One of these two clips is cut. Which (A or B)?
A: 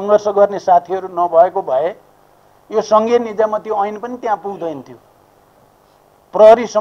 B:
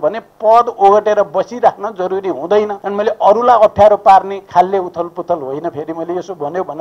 B